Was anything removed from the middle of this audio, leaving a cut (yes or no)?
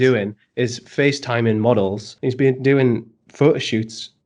yes